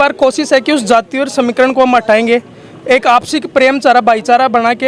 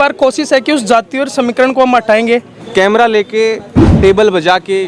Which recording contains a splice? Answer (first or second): second